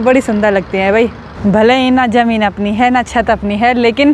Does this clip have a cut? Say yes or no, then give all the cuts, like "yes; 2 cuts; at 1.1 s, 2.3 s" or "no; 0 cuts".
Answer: yes; 1 cut; at 1.3 s